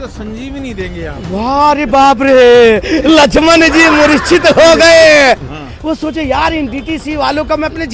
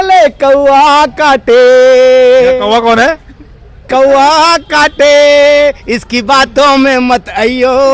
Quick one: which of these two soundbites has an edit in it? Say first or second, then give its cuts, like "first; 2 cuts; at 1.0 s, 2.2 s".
first; 1 cut; at 5.5 s